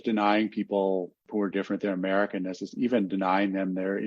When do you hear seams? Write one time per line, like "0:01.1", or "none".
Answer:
none